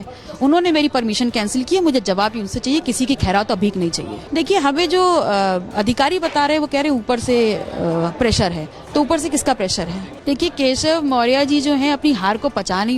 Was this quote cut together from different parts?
yes; 2 cuts; at 4.2 s, 10.2 s

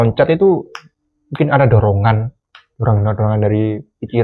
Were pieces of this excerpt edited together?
no; 0 cuts

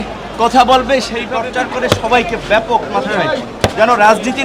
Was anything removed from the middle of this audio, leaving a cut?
yes; 1 cut; at 1.2 s

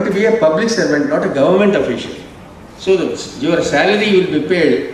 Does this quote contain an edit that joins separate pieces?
no; 0 cuts

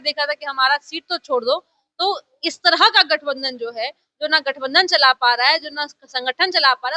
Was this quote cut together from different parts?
no; 0 cuts

